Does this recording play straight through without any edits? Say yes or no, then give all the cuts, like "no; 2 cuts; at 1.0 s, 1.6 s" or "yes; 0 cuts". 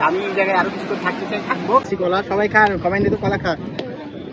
no; 1 cut; at 1.9 s